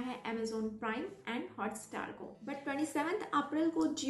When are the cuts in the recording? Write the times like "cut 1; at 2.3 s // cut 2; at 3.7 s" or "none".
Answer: cut 1; at 2.5 s